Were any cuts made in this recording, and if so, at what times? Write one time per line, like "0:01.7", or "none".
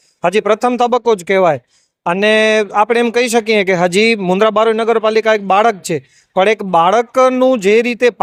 none